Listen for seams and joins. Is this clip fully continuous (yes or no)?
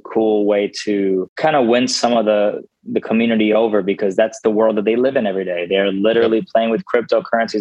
no